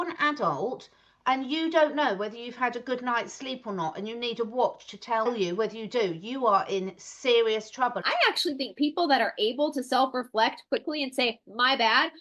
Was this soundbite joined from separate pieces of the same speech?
yes; 2 cuts; at 5.3 s, 8.0 s

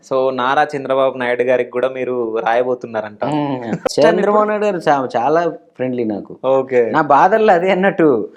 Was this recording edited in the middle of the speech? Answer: yes; 1 cut; at 3.9 s

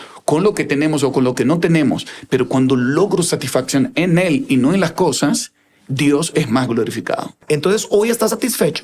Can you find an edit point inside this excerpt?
yes; 1 cut; at 7.4 s

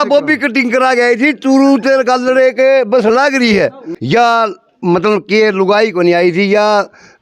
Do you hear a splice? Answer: yes; 1 cut; at 3.9 s

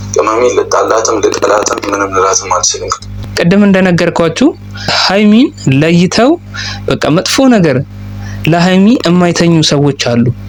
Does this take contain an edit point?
no; 0 cuts

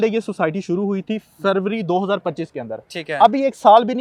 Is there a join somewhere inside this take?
no; 0 cuts

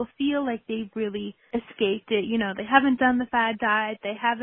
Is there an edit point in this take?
yes; 1 cut; at 1.4 s

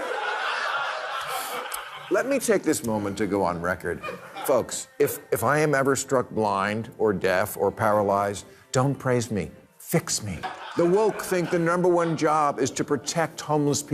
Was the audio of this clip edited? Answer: yes; 1 cut; at 10.4 s

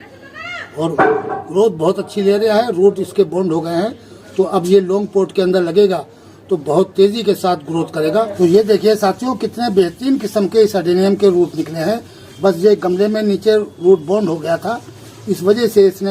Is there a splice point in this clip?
yes; 1 cut; at 8.3 s

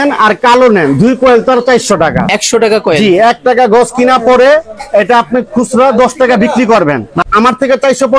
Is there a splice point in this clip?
yes; 2 cuts; at 2.4 s, 7.1 s

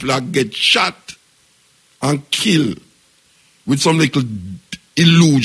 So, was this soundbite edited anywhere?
no; 0 cuts

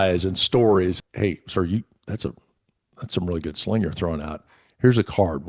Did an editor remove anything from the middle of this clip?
yes; 1 cut; at 1.0 s

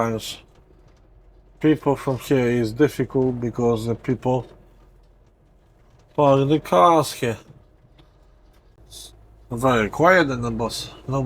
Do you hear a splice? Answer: yes; 1 cut; at 8.8 s

